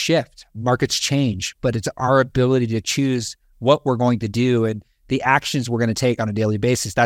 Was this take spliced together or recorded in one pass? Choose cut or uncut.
uncut